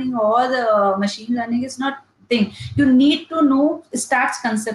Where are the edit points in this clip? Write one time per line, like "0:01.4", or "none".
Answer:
none